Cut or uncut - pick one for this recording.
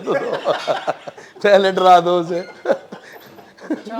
uncut